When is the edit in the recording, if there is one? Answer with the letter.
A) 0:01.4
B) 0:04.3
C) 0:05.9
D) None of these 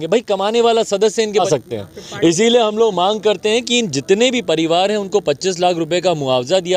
A